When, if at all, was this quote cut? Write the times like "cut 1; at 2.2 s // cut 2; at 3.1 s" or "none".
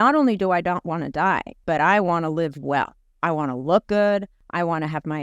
cut 1; at 1.5 s // cut 2; at 4.4 s

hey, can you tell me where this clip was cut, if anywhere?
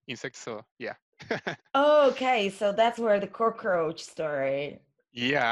none

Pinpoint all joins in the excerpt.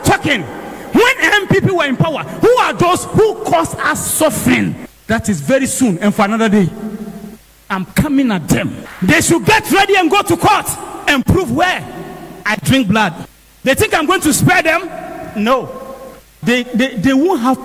none

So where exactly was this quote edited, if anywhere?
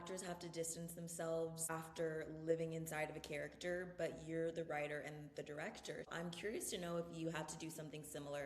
cut 1; at 1.6 s // cut 2; at 6.1 s

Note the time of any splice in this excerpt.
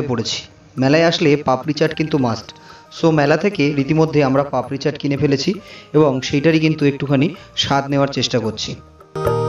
none

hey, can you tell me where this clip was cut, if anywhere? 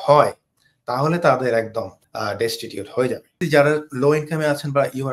cut 1; at 2.0 s // cut 2; at 3.4 s

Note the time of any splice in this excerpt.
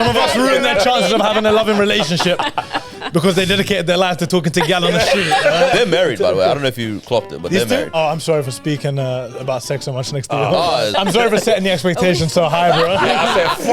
cut 1; at 5.7 s // cut 2; at 7.9 s // cut 3; at 10.9 s

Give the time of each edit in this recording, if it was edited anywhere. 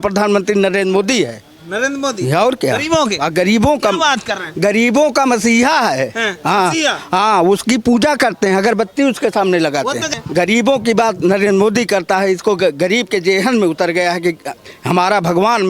cut 1; at 10.1 s

